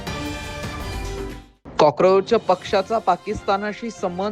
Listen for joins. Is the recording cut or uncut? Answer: cut